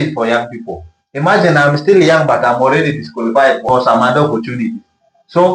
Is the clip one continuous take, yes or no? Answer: no